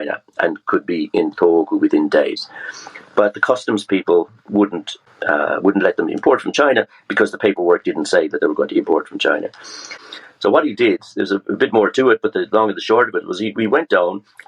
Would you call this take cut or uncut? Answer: cut